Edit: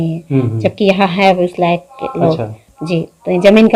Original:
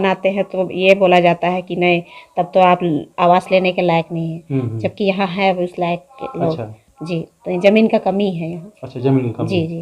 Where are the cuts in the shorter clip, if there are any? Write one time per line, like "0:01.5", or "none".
none